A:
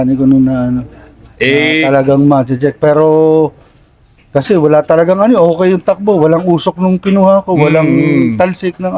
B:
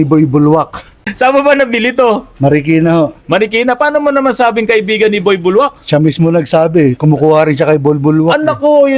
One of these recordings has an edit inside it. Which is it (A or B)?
B